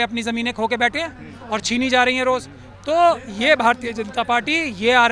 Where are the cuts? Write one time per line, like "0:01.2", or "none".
none